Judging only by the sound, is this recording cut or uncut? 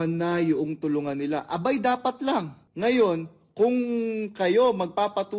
cut